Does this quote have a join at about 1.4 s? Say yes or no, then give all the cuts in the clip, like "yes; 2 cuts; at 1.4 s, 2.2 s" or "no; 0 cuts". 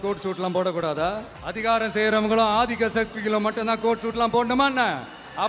yes; 1 cut; at 1.4 s